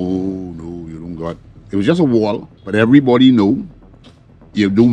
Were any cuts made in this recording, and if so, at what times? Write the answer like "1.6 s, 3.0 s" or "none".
2.5 s